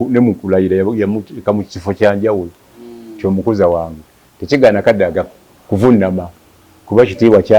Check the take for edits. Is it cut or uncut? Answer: uncut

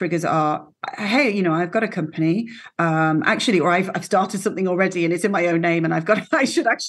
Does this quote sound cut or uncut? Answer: uncut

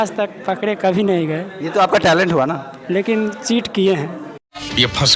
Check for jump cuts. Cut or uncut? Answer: uncut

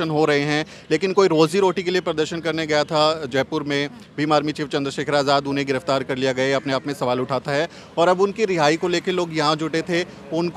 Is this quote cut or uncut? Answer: uncut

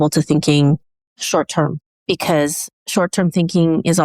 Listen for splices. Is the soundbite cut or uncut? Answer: uncut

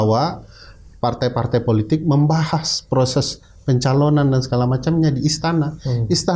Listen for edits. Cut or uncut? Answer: uncut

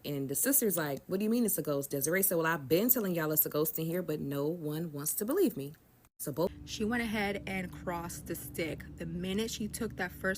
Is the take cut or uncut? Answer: cut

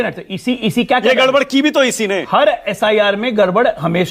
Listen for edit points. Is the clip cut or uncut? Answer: uncut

